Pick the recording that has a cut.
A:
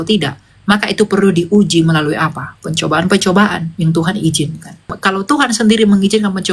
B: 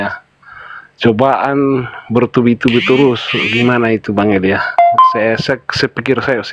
A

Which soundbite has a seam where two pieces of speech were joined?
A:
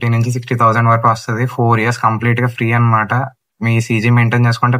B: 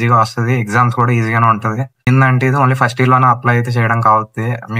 B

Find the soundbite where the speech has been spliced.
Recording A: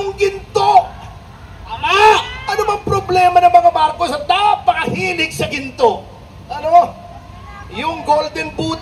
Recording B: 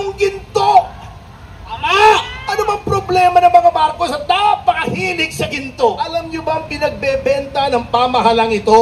B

